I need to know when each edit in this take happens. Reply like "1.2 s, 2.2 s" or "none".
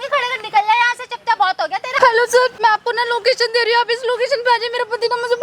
1.9 s, 2.5 s